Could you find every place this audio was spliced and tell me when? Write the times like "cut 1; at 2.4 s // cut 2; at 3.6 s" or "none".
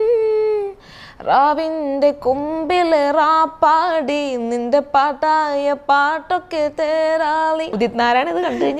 cut 1; at 7.7 s